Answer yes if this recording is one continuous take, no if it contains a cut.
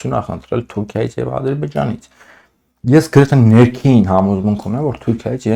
yes